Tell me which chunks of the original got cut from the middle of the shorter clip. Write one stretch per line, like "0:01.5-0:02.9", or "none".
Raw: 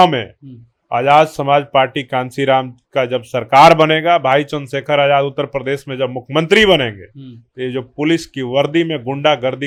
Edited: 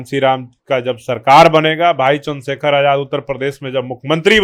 none